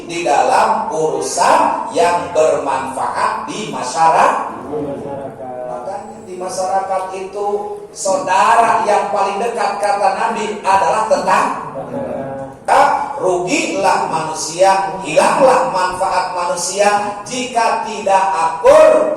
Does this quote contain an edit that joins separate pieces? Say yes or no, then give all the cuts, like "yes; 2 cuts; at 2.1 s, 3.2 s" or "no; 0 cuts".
yes; 1 cut; at 12.6 s